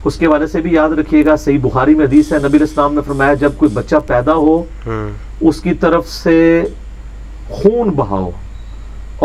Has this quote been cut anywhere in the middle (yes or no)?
no